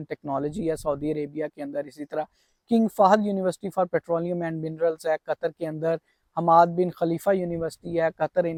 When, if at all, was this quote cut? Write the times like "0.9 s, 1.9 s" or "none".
none

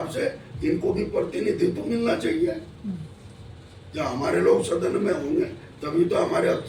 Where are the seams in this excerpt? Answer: none

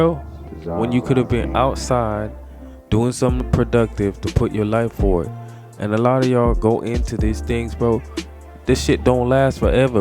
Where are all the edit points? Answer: 8.6 s

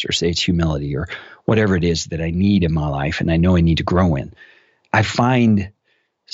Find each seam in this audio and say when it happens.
4.9 s

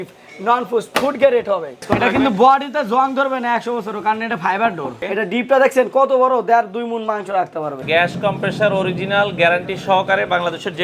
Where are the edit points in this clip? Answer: 1.8 s, 5.0 s, 7.8 s

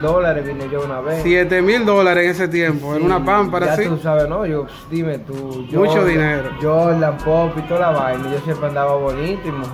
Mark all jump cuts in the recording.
none

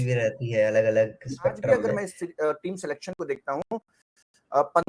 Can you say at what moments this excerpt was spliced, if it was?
1.8 s

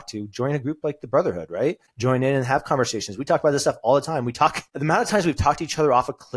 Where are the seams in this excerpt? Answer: 1.9 s, 4.7 s

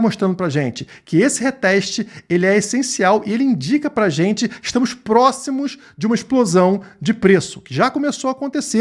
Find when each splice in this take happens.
none

